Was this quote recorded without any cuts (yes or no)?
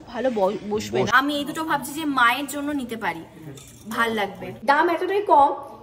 no